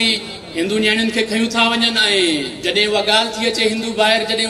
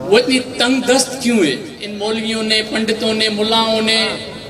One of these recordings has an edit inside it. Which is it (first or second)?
second